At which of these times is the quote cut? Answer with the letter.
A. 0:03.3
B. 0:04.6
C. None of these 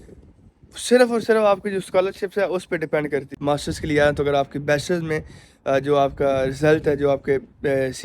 A